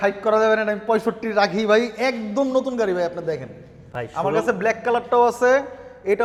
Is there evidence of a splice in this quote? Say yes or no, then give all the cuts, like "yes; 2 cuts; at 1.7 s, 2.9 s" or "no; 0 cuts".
no; 0 cuts